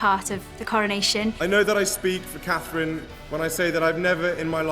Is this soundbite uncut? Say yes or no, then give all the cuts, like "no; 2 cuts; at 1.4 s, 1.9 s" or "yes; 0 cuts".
no; 1 cut; at 1.4 s